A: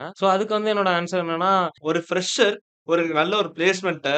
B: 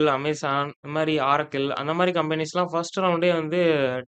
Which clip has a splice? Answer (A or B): A